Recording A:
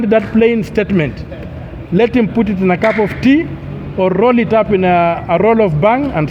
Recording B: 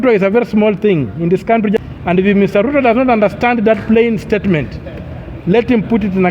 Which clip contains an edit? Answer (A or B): B